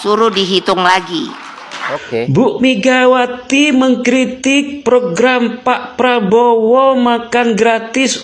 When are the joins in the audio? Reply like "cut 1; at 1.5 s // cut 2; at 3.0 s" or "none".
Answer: none